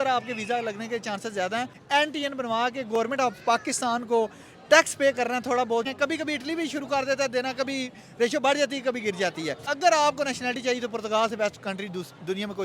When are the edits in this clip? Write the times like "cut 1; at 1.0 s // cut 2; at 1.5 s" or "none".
cut 1; at 1.8 s // cut 2; at 5.9 s // cut 3; at 9.7 s